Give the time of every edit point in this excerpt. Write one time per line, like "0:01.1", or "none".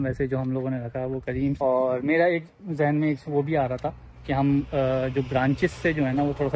0:01.6